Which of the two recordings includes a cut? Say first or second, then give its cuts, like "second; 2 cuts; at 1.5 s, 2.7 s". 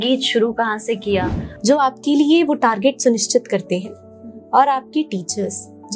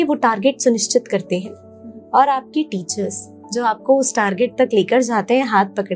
first; 1 cut; at 1.4 s